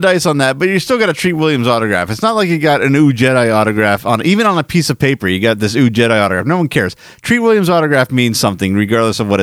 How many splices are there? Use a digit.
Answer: 0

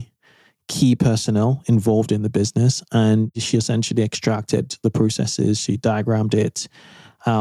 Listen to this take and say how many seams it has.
1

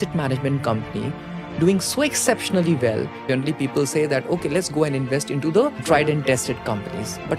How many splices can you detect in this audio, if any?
2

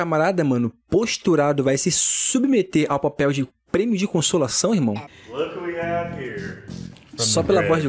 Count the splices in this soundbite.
1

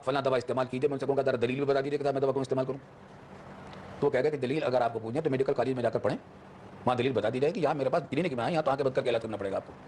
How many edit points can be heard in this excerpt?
0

